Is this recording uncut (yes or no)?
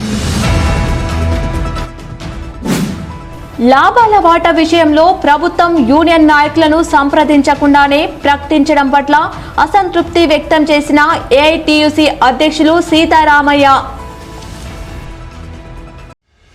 no